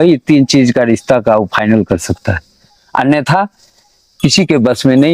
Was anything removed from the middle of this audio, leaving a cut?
no; 0 cuts

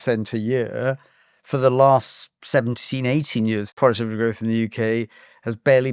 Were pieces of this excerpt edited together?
yes; 1 cut; at 3.7 s

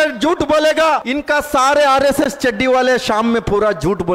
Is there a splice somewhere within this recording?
yes; 1 cut; at 1.1 s

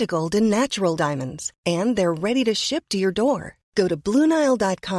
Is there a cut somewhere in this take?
no; 0 cuts

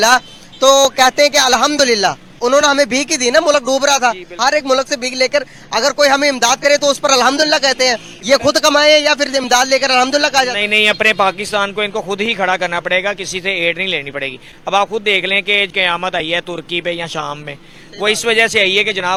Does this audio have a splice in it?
no; 0 cuts

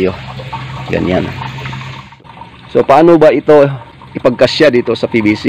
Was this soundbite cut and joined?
yes; 1 cut; at 2.0 s

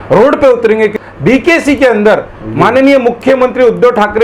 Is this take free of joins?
no; 1 cut; at 1.0 s

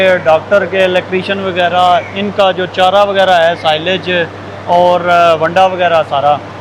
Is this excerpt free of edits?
yes; 0 cuts

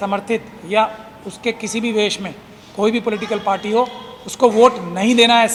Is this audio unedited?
yes; 0 cuts

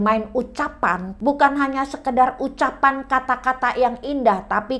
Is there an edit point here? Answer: yes; 1 cut; at 1.1 s

